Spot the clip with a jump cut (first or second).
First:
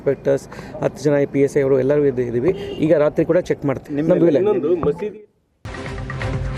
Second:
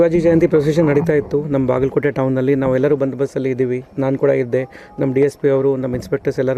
first